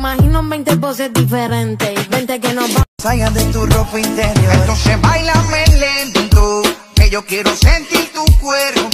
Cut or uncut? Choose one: cut